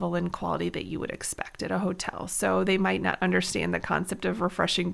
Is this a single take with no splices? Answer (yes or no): yes